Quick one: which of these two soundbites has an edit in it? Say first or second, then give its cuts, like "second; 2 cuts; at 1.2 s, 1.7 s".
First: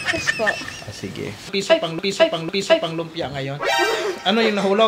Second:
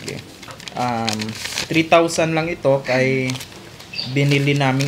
first; 1 cut; at 1.5 s